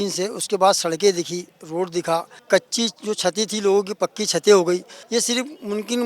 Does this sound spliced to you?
yes; 2 cuts; at 2.3 s, 5.0 s

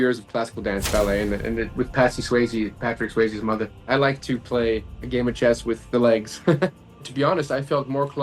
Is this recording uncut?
no; 2 cuts; at 3.9 s, 6.7 s

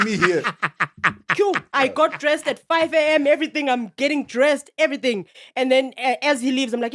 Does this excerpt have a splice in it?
no; 0 cuts

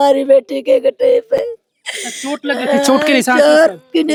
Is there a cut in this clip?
no; 0 cuts

